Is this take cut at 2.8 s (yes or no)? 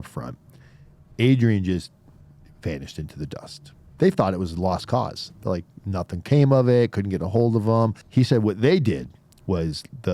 no